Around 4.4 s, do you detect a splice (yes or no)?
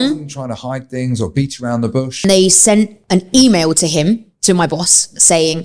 no